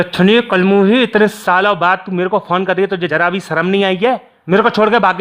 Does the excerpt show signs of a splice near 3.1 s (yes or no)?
yes